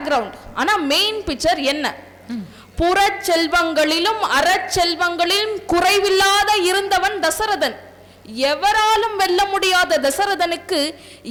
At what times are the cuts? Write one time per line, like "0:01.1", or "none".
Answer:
none